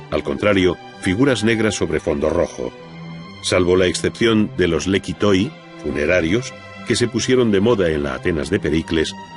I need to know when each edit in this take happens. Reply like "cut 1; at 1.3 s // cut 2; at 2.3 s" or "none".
cut 1; at 5.3 s